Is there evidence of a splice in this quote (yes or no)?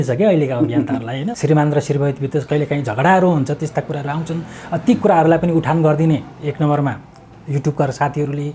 yes